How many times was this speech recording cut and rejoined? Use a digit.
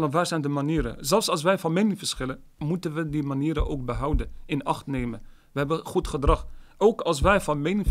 0